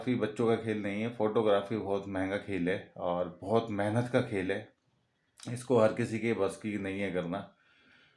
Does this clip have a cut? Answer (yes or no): no